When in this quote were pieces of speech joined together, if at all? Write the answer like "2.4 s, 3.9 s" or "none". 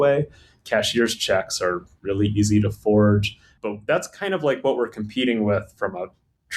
3.5 s